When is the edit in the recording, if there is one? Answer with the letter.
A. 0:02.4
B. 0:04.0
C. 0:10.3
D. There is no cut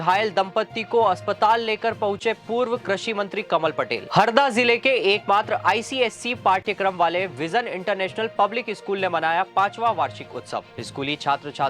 B